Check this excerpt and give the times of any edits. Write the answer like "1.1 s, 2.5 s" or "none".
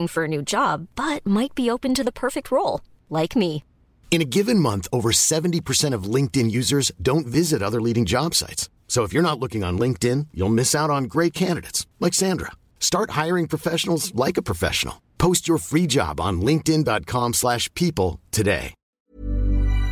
18.8 s